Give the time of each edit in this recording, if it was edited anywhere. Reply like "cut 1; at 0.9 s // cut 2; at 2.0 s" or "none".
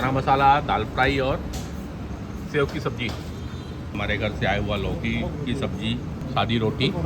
cut 1; at 4.0 s // cut 2; at 6.2 s